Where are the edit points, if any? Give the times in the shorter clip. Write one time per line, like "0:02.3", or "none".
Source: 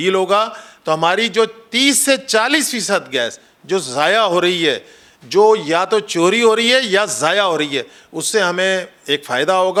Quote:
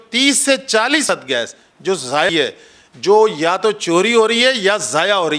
0:01.0
0:02.3

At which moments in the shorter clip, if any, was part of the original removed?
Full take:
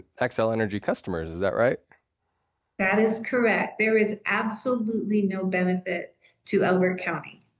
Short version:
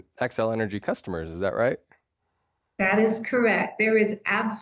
none

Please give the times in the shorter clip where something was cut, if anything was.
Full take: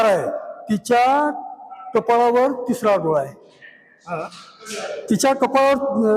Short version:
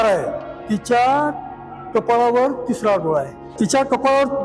0:03.4

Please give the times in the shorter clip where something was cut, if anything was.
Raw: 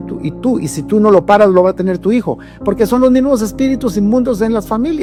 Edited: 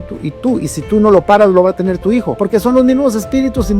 0:02.4

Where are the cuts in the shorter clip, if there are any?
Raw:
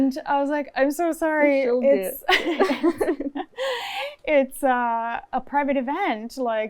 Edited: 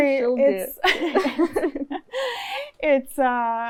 none

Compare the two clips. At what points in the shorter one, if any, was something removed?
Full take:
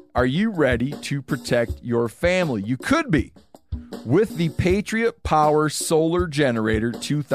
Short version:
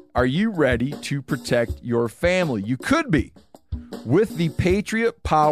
none

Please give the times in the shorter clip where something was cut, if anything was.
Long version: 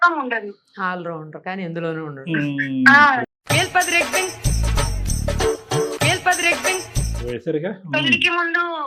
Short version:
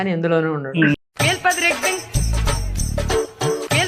0:00.9

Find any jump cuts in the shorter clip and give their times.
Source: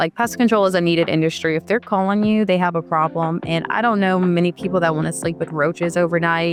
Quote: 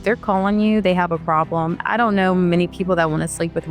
0:01.8

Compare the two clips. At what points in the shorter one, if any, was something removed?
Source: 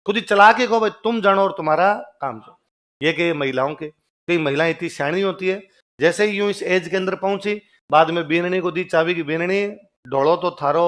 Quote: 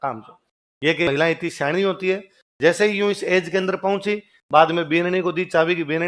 0:01.1

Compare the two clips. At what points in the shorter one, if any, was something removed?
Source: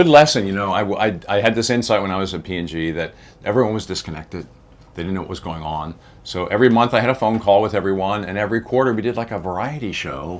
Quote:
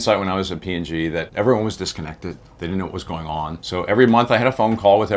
0:01.3
0:02.5
0:03.6

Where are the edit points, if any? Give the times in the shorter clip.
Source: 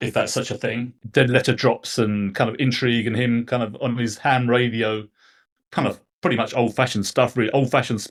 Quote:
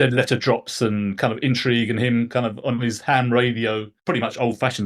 0:03.9

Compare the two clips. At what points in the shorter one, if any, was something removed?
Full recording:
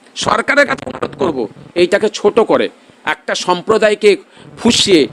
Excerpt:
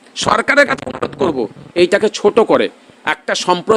none

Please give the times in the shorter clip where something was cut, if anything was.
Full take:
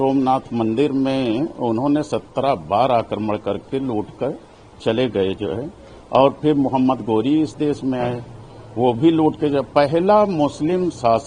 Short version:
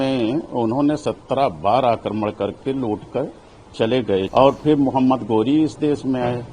0:04.3

